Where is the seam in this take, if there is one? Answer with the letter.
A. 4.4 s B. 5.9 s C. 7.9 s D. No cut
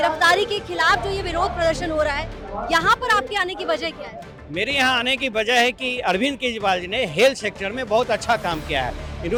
D